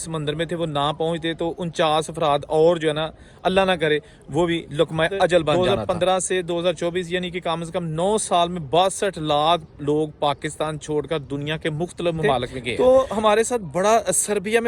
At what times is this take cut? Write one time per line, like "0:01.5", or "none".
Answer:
0:05.6
0:12.6

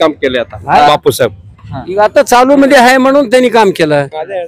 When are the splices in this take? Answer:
none

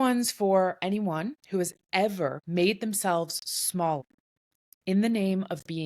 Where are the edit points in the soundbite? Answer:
0:01.4
0:02.4
0:04.1

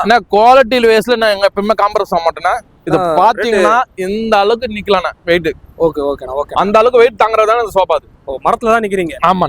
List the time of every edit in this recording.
none

